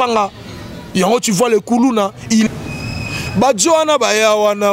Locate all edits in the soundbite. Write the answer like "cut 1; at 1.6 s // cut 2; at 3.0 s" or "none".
cut 1; at 2.5 s